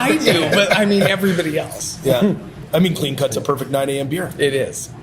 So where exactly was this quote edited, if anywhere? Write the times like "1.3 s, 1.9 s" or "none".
2.5 s